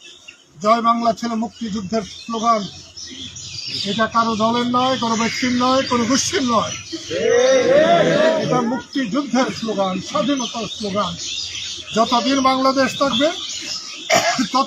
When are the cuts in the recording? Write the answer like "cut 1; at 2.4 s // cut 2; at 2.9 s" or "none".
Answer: none